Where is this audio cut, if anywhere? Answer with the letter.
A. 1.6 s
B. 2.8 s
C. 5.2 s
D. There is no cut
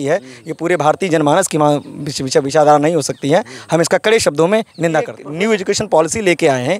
C